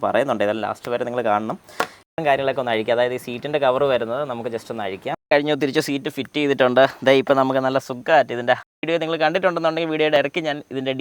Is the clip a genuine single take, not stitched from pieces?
no; 3 cuts; at 2.2 s, 5.3 s, 8.6 s

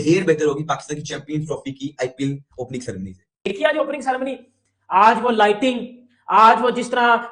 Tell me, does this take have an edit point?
yes; 1 cut; at 3.3 s

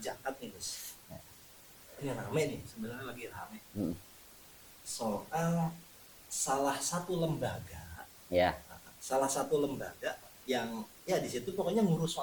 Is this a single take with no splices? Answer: yes; 0 cuts

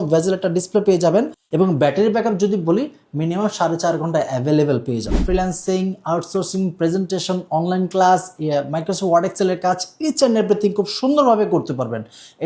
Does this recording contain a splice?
yes; 2 cuts; at 1.4 s, 5.2 s

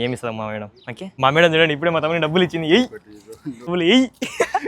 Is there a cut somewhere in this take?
yes; 2 cuts; at 1.0 s, 3.7 s

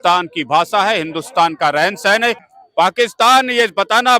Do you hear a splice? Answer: yes; 1 cut; at 2.5 s

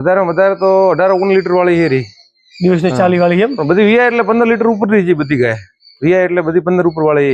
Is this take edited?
no; 0 cuts

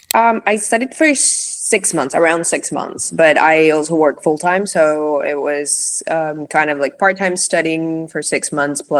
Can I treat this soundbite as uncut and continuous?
yes; 0 cuts

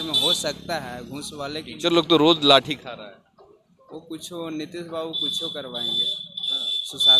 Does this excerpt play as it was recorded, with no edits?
yes; 0 cuts

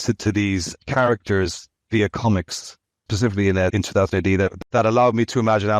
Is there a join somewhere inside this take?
yes; 3 cuts; at 3.0 s, 3.7 s, 4.6 s

